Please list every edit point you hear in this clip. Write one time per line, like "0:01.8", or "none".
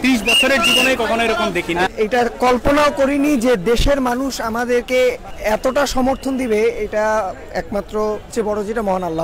0:01.9
0:05.3
0:08.3